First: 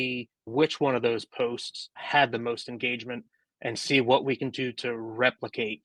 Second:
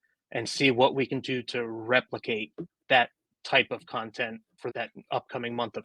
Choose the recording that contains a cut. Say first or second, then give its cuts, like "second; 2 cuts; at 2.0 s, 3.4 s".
second; 1 cut; at 4.7 s